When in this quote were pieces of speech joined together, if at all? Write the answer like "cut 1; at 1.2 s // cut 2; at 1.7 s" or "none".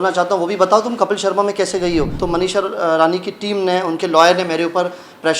cut 1; at 2.1 s